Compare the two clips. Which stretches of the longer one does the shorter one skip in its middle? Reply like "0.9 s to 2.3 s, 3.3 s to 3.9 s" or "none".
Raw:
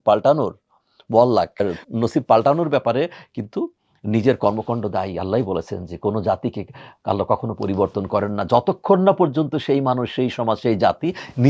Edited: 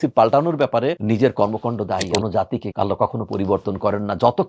3.1 s to 4.0 s, 5.3 s to 6.5 s